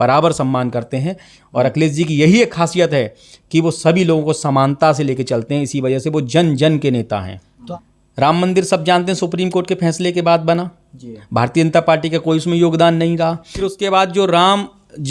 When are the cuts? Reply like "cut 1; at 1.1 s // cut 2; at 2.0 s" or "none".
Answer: cut 1; at 7.6 s // cut 2; at 13.5 s

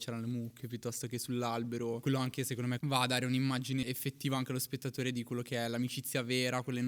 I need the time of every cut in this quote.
cut 1; at 2.0 s // cut 2; at 2.8 s // cut 3; at 3.8 s

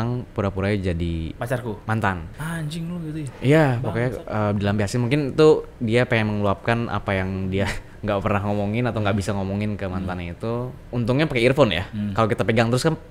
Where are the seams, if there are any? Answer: cut 1; at 1.3 s // cut 2; at 10.8 s

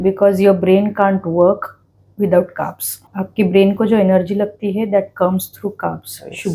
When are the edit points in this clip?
cut 1; at 3.1 s

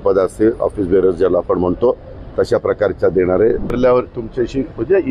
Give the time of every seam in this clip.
cut 1; at 3.8 s

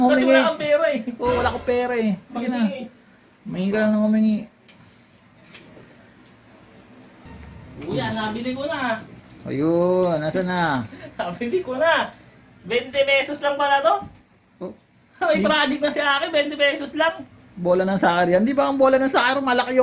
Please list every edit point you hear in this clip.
cut 1; at 7.1 s

